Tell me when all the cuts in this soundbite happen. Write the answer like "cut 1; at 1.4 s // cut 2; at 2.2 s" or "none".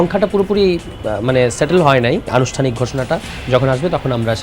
cut 1; at 2.3 s